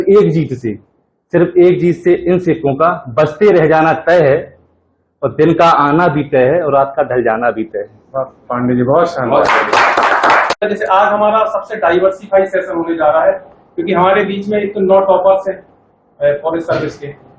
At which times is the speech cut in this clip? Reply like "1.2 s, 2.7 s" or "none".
10.6 s